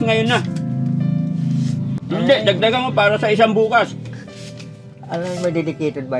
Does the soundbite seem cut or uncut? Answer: cut